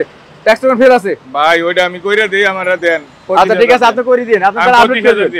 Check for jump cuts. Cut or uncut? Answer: uncut